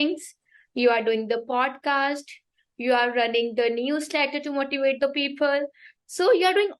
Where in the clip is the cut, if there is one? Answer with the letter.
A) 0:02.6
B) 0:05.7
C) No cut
C